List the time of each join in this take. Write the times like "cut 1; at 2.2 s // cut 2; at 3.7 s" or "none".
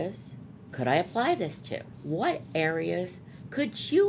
cut 1; at 1.9 s